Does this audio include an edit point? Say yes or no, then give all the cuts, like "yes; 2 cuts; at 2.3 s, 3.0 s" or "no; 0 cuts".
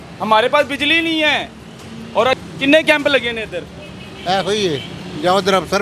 yes; 1 cut; at 2.4 s